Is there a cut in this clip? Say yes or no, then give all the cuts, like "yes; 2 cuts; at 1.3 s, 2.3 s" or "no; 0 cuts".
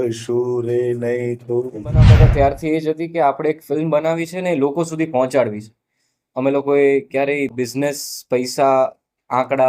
yes; 1 cut; at 2.1 s